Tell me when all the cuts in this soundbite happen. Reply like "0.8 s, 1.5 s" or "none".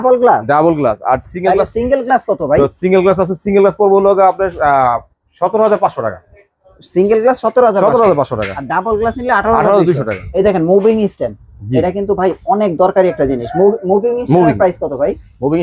10.2 s